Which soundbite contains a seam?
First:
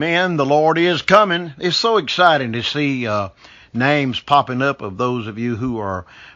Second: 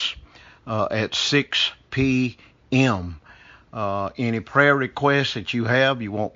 first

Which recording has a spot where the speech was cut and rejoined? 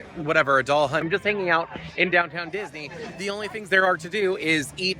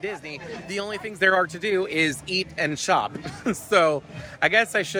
first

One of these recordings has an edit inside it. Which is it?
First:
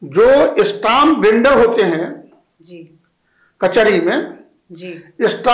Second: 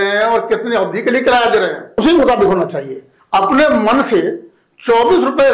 second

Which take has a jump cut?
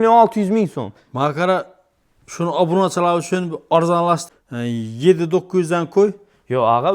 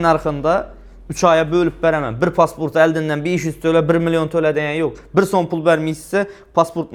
first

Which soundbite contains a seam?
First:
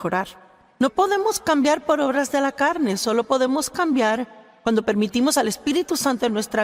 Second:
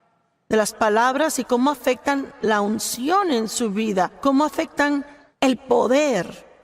second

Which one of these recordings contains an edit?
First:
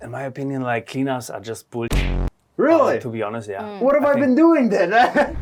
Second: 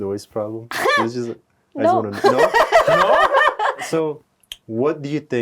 second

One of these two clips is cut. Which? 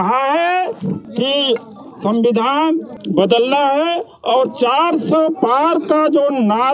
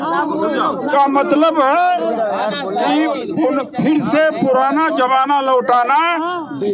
first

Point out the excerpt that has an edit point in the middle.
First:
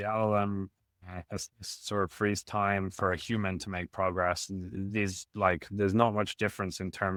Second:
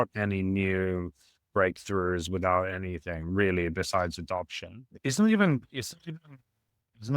second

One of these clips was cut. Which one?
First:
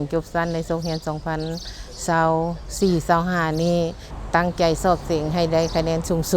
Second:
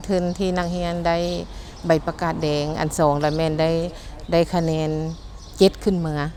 first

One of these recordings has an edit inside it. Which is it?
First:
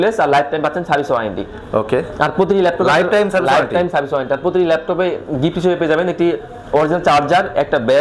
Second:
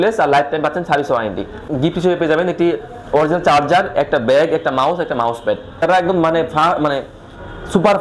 second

